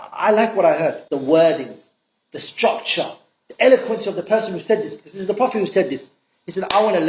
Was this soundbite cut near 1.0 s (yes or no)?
yes